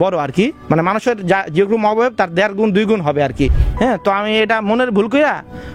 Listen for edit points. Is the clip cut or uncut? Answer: cut